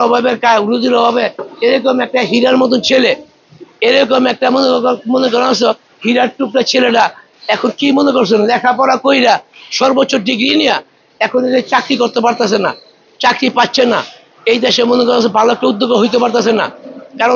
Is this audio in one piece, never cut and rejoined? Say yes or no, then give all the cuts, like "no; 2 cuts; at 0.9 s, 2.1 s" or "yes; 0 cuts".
yes; 0 cuts